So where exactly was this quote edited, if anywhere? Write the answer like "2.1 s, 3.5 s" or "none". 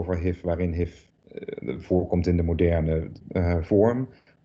1.1 s, 3.2 s